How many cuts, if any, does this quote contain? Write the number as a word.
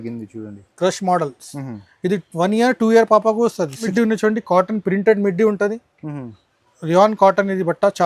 one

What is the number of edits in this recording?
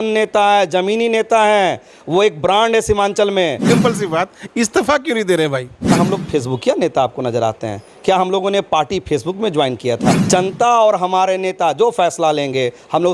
three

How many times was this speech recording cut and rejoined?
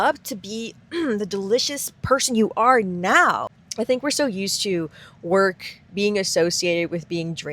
one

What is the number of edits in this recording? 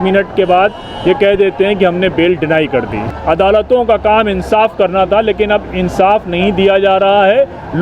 one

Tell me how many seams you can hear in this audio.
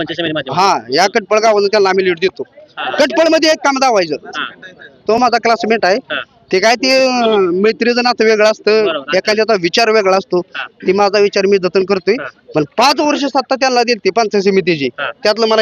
zero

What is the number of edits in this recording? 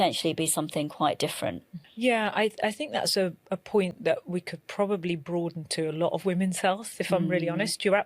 one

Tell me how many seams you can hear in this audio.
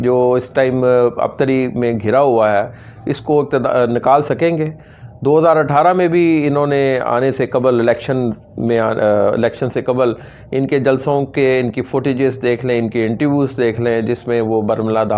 zero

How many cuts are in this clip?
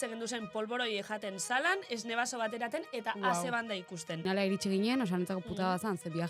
one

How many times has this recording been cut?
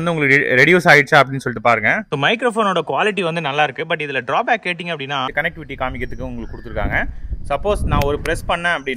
two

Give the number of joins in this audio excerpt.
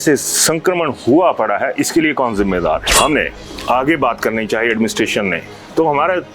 one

